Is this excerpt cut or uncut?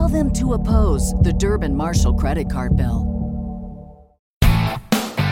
cut